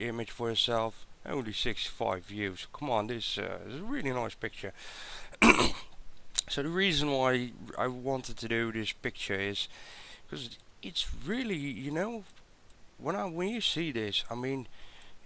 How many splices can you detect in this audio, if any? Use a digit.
0